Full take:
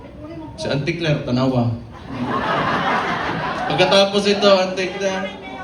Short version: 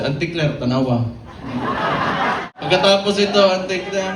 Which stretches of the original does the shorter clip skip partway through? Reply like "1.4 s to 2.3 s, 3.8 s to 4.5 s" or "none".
3.2 s to 3.6 s